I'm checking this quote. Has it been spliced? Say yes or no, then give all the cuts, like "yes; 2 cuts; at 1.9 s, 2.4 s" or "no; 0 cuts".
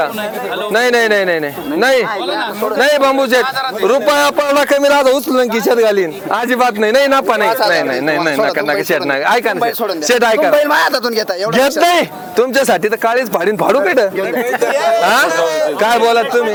no; 0 cuts